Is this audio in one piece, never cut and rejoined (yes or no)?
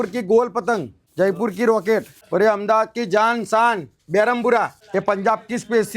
no